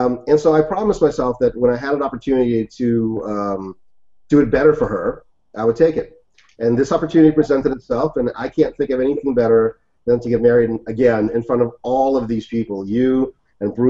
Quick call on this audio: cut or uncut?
cut